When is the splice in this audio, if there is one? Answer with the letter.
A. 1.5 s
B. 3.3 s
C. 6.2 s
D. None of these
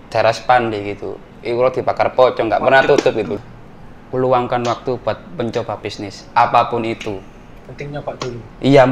B